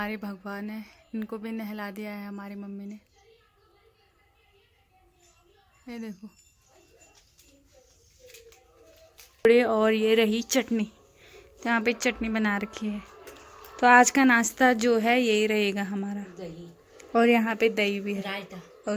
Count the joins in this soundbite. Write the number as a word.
one